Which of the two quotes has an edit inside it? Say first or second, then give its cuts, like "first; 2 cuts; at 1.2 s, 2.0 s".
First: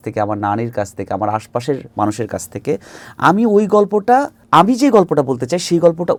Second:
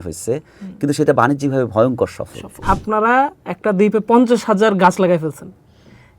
second; 1 cut; at 2.6 s